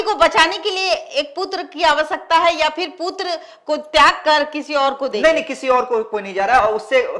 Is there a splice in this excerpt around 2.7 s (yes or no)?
no